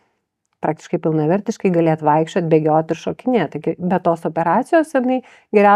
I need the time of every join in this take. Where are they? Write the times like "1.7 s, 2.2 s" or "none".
none